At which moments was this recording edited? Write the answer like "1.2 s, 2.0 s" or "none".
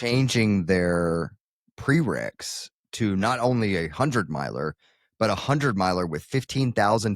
none